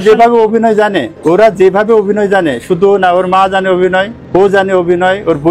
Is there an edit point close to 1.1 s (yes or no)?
yes